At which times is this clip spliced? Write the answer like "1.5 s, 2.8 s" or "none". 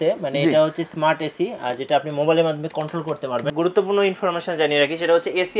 3.5 s